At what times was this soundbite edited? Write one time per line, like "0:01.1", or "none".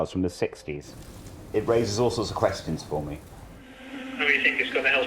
0:01.4